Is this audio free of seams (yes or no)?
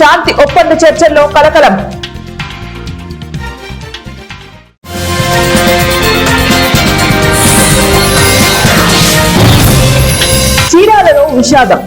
no